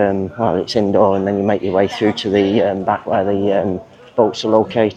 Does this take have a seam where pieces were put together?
no; 0 cuts

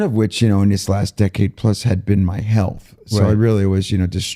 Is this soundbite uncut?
yes; 0 cuts

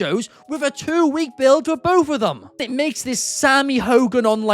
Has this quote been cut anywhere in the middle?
yes; 1 cut; at 2.7 s

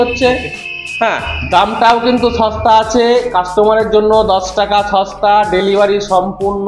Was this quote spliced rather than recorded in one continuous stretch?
no; 0 cuts

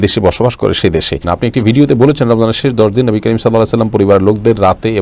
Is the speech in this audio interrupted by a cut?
yes; 1 cut; at 1.2 s

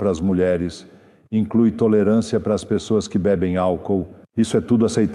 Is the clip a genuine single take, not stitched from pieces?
yes; 0 cuts

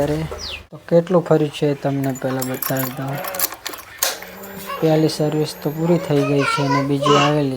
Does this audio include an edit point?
yes; 1 cut; at 0.9 s

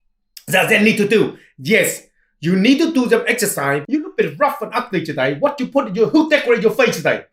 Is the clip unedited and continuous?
no; 1 cut; at 3.8 s

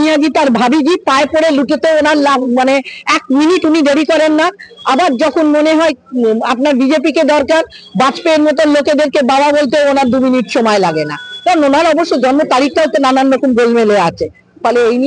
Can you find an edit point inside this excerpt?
no; 0 cuts

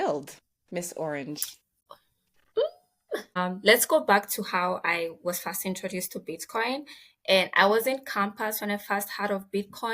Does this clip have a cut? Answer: yes; 1 cut; at 3.3 s

